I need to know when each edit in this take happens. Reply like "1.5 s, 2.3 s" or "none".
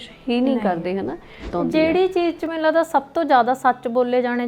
1.5 s